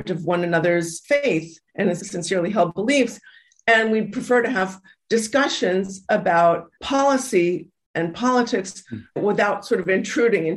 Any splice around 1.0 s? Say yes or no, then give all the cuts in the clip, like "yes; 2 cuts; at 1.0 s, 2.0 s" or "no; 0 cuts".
yes; 4 cuts; at 1.0 s, 2.0 s, 6.7 s, 9.1 s